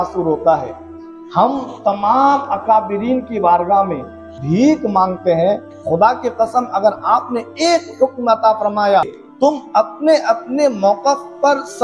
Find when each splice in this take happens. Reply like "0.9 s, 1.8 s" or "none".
4.3 s, 5.6 s, 9.0 s